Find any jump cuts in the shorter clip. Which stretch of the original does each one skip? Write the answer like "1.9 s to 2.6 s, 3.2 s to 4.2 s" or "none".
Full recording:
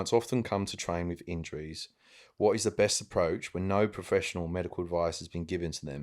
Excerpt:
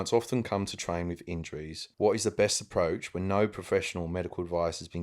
1.8 s to 2.2 s